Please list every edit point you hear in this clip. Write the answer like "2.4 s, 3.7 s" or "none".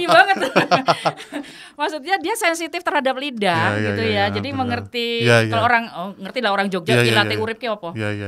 none